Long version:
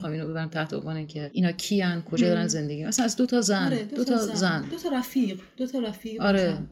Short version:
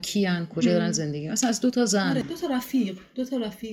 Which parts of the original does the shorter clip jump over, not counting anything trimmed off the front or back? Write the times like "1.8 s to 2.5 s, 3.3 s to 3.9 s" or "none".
3.8 s to 4.7 s

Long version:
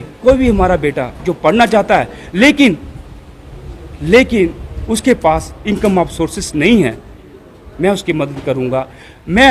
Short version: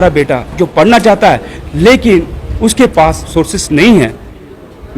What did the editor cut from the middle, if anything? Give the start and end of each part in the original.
2.2 s to 3.8 s, 5.6 s to 6.1 s

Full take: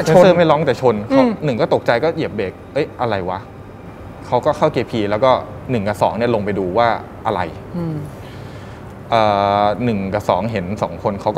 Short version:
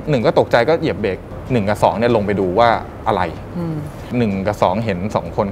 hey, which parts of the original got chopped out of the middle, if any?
2.6 s to 5.5 s, 8.3 s to 9.8 s

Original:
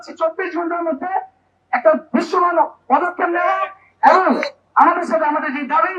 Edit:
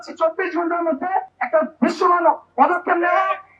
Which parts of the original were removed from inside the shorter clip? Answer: 1.4 s to 1.7 s

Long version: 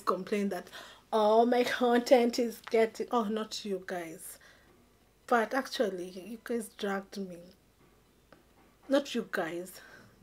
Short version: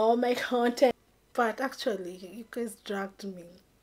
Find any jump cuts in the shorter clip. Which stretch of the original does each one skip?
2.2 s to 4.8 s

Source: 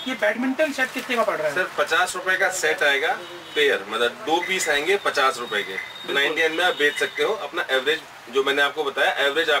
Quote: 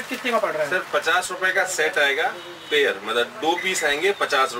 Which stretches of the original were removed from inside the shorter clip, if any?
none

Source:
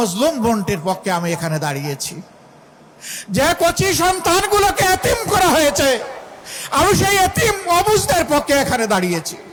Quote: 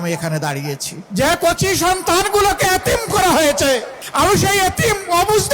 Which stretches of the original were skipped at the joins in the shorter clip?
2.1 s to 3.1 s, 6.2 s to 6.6 s

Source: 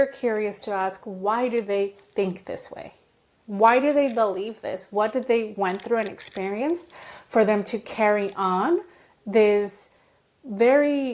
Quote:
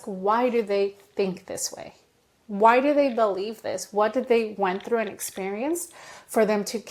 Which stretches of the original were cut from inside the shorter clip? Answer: none

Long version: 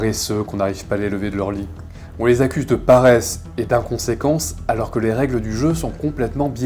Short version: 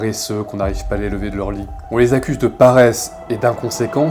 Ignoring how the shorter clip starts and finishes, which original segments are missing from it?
1.7 s to 2.0 s

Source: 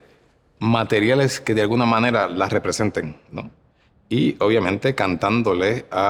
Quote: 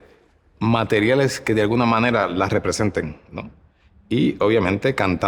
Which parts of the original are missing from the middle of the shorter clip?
none

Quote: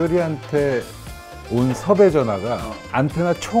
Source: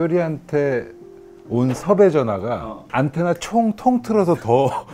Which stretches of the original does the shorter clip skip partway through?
none

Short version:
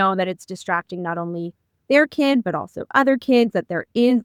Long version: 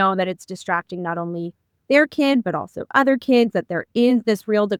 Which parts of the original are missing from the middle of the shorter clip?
none

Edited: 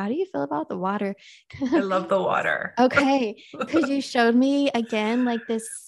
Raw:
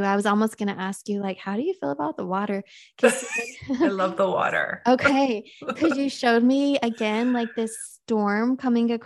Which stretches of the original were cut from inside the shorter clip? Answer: 2.8 s to 3.4 s

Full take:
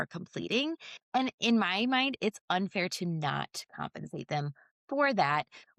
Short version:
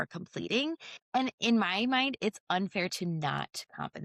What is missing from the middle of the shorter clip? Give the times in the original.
none

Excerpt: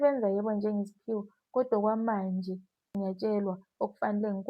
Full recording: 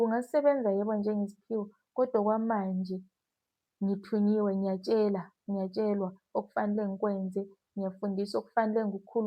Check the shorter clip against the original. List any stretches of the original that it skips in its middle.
3.2 s to 5.3 s

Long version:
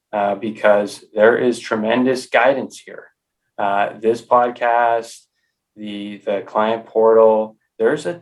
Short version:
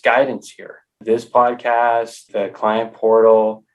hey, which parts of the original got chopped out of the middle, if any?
3.3 s to 3.9 s, 5.2 s to 6.1 s

